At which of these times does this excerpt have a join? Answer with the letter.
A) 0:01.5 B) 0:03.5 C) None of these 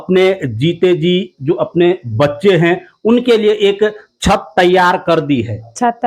C